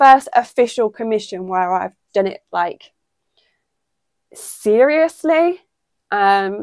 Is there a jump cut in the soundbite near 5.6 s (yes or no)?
no